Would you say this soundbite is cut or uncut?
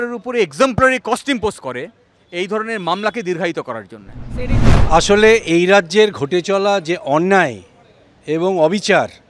cut